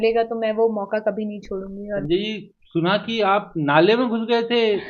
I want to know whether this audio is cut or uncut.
cut